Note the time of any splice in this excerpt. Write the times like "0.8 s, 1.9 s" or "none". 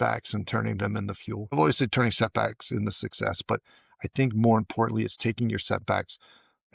1.5 s